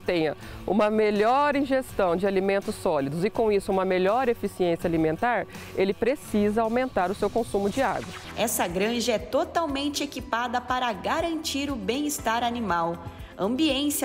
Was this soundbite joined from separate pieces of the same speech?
yes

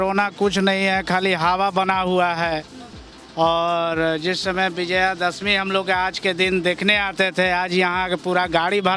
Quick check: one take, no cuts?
yes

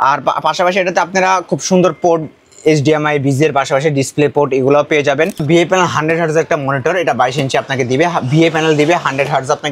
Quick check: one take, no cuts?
no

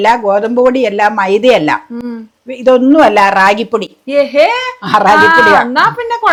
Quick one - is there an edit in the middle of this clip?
no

